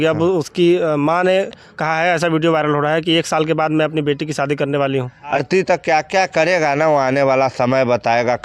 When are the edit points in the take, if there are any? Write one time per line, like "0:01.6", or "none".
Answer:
0:05.3